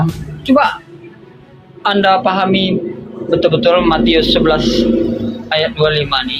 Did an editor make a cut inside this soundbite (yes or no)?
no